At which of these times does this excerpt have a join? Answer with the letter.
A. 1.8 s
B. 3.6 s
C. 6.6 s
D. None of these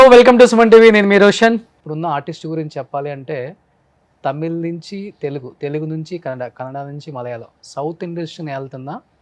A